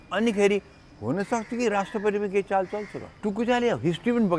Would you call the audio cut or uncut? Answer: cut